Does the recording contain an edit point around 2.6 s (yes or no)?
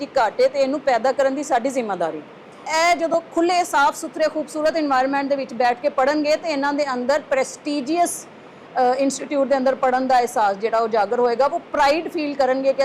yes